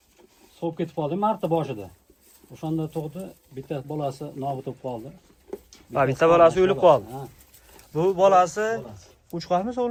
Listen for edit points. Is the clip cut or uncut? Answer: uncut